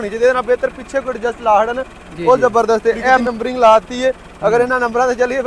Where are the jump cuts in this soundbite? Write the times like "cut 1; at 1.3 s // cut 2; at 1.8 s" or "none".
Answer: cut 1; at 3.2 s